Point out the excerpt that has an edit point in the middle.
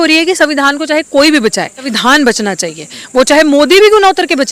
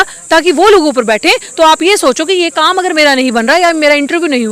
first; 1 cut; at 1.9 s

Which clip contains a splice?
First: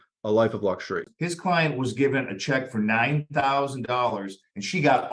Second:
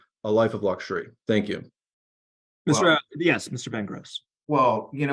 first; 1 cut; at 1.1 s

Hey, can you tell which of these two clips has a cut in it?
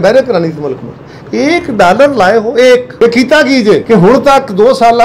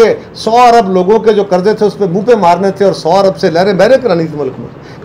first; 1 cut; at 2.9 s

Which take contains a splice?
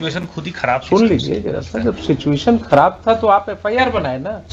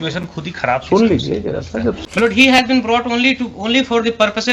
second; 1 cut; at 2.0 s

